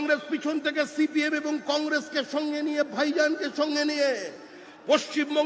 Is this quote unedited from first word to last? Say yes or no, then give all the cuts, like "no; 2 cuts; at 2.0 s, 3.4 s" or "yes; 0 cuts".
yes; 0 cuts